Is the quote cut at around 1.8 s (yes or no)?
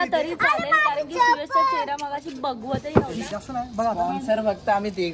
no